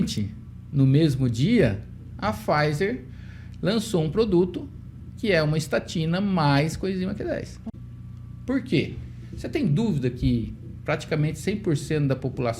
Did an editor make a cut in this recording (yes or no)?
yes